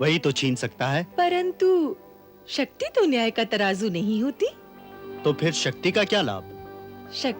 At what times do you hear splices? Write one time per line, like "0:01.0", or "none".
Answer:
0:01.1